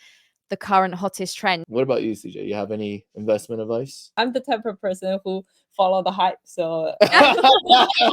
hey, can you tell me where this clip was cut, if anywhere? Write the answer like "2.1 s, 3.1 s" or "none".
1.6 s, 4.2 s